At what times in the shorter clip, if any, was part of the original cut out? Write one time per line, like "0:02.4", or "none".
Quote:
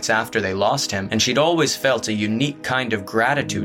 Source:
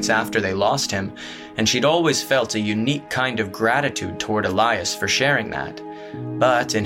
0:01.0